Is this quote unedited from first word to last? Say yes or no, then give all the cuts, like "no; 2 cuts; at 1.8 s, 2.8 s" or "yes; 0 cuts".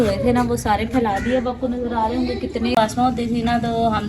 no; 1 cut; at 2.8 s